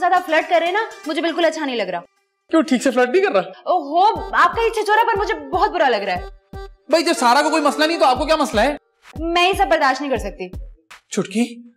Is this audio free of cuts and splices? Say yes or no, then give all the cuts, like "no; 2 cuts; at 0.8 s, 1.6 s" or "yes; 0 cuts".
yes; 0 cuts